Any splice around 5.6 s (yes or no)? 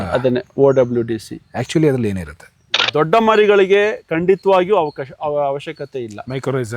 no